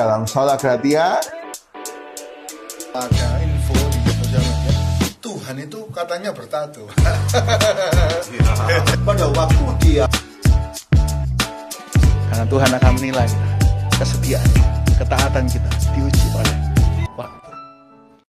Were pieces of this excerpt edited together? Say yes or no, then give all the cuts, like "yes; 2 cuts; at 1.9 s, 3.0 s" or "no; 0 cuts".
no; 0 cuts